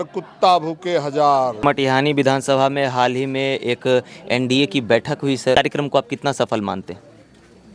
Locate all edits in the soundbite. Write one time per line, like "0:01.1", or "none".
0:01.6
0:05.5